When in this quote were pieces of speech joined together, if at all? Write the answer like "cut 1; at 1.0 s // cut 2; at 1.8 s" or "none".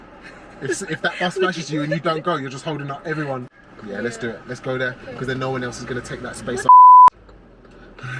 cut 1; at 3.5 s